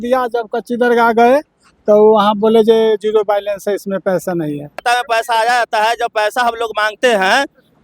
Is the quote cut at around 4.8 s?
yes; 1 cut; at 4.8 s

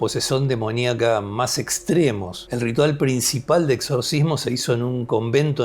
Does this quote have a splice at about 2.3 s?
yes; 1 cut; at 2.3 s

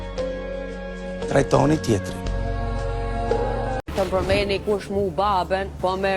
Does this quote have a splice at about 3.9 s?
yes; 1 cut; at 3.9 s

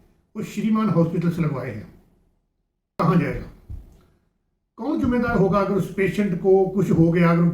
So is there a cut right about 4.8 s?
no; 1 cut; at 2.9 s

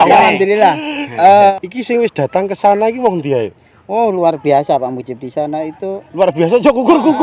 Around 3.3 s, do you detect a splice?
no; 1 cut; at 1.5 s

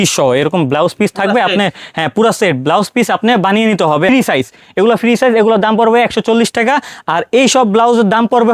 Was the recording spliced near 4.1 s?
yes; 1 cut; at 4.1 s

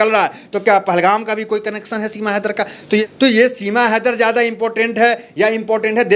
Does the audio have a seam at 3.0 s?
yes; 1 cut; at 3.0 s

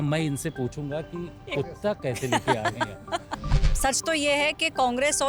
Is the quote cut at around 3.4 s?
yes; 1 cut; at 3.4 s

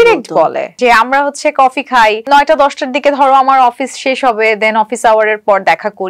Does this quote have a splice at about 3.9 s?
no; 2 cuts; at 0.8 s, 2.2 s

